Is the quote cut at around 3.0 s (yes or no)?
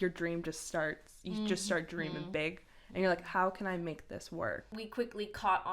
no